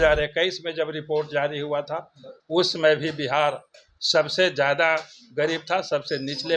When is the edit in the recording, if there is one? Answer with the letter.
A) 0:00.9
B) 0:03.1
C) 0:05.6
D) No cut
D